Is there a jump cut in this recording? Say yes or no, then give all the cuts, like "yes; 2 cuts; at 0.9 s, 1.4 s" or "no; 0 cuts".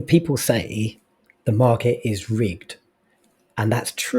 no; 0 cuts